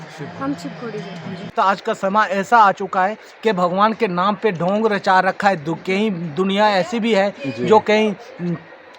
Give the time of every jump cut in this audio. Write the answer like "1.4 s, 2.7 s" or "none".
1.5 s